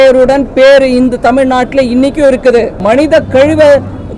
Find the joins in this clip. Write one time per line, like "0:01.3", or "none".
0:02.8